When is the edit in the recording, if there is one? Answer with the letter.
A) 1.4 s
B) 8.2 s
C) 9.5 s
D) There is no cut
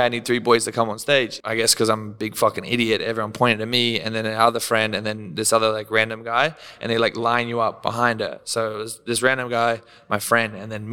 A